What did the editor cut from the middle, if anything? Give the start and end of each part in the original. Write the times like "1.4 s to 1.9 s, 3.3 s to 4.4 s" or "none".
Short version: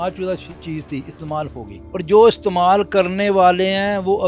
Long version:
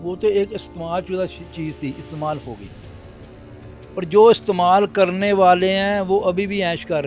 2.7 s to 3.8 s